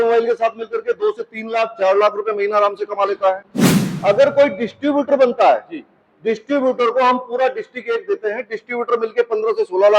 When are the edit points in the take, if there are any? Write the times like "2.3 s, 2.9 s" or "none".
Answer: none